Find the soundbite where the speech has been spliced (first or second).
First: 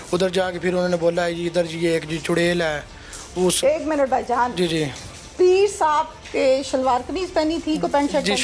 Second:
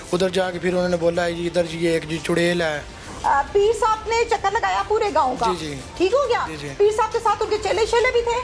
second